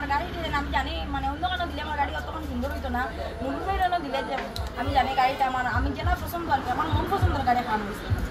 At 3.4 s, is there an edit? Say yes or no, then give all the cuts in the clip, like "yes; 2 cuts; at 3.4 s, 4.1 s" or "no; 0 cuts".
no; 0 cuts